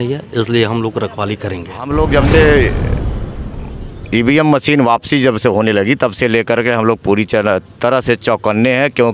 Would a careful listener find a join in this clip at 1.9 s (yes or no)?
yes